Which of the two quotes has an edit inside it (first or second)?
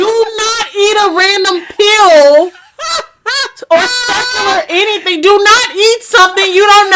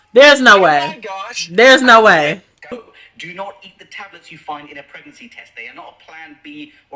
second